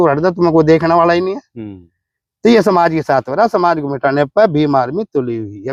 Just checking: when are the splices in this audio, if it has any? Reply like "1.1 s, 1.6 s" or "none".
none